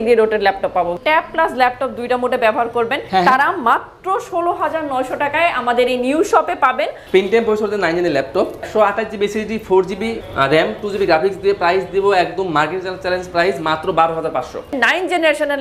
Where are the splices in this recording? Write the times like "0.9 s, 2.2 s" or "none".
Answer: 1.0 s, 3.0 s, 7.0 s, 8.6 s, 14.8 s

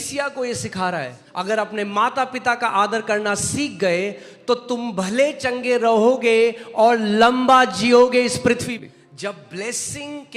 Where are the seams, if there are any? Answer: 1.2 s, 8.6 s

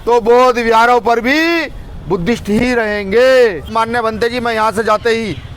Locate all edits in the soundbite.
3.7 s

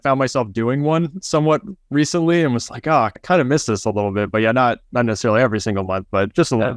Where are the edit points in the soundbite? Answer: 3.1 s

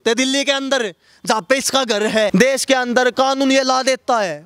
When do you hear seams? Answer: 2.3 s

